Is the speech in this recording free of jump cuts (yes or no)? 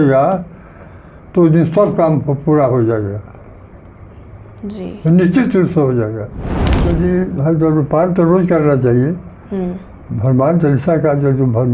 no